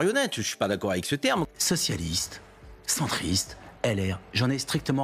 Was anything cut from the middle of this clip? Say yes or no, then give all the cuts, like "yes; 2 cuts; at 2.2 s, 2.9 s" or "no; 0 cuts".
yes; 1 cut; at 1.5 s